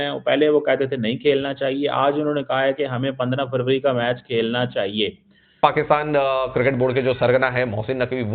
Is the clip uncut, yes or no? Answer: no